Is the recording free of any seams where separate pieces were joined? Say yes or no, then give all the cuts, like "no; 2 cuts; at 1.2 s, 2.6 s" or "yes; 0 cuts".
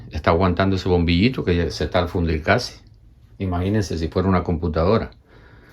yes; 0 cuts